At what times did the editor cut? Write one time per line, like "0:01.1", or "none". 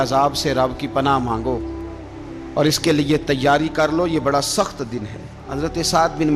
0:05.4